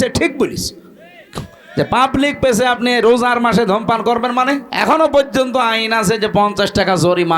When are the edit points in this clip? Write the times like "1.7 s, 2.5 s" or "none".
4.7 s